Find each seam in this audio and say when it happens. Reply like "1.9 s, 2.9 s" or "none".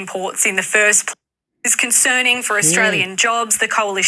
1.2 s